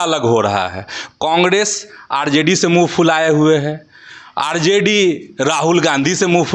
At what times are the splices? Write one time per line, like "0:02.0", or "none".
none

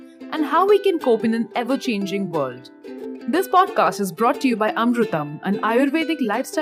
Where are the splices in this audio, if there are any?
none

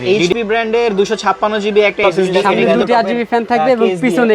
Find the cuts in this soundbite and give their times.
0:02.3

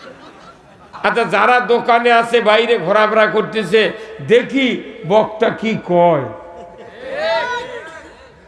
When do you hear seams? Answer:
0:00.9

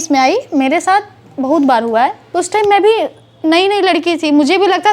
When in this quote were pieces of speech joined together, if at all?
0:02.2

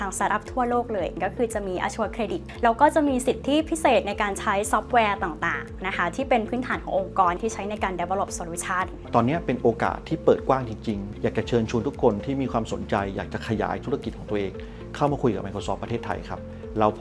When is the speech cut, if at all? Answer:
0:01.1
0:02.5
0:07.4
0:09.1
0:11.1

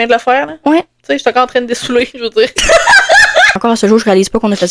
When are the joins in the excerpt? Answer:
0:03.6

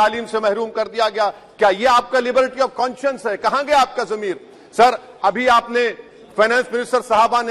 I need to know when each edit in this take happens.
none

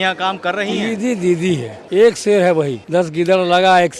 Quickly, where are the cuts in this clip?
0:01.8
0:02.8

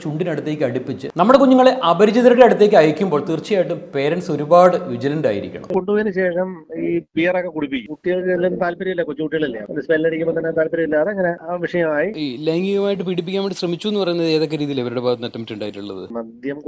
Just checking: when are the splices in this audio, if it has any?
0:01.1
0:05.7
0:12.1

